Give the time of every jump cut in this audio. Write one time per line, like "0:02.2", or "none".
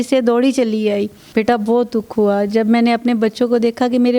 0:01.2